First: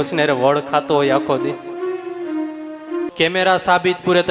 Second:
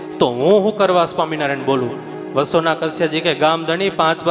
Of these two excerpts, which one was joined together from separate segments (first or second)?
first